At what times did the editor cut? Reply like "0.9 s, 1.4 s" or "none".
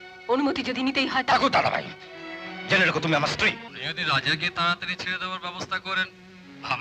3.7 s